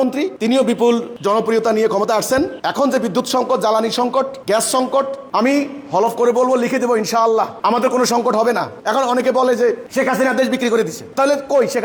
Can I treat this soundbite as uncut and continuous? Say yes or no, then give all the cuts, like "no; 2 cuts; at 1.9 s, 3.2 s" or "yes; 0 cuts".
yes; 0 cuts